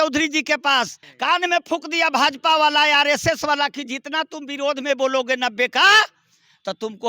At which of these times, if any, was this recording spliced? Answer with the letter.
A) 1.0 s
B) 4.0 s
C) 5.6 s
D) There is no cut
A